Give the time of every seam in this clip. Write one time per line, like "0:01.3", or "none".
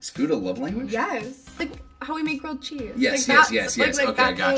0:01.6

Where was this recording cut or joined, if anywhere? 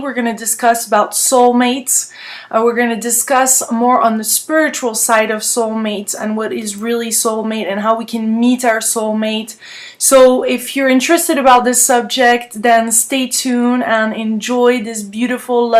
0:11.2

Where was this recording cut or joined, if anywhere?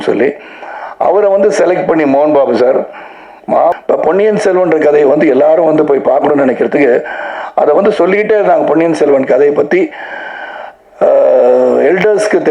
0:03.7

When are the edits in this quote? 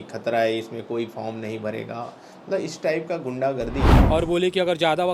0:03.9

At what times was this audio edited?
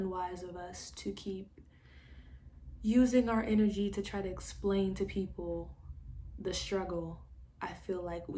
none

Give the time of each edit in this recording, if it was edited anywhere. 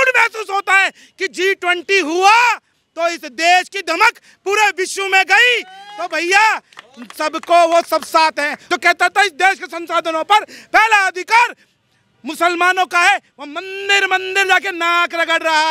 0:08.6

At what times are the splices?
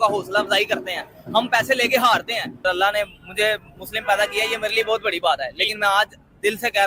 0:02.6

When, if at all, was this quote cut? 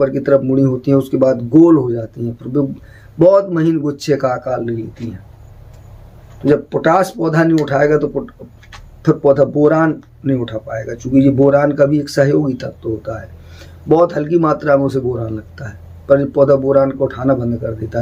none

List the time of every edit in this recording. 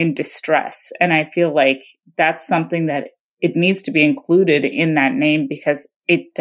none

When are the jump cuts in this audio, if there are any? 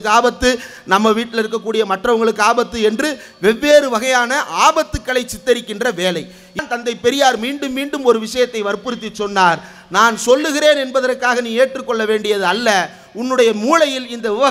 0:06.6

